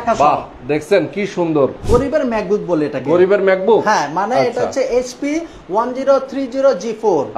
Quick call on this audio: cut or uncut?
cut